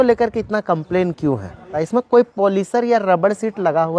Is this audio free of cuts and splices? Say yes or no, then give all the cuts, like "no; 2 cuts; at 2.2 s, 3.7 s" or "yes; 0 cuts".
no; 1 cut; at 1.8 s